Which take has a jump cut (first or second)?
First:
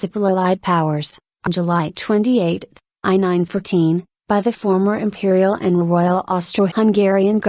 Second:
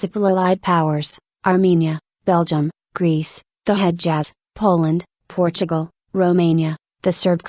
second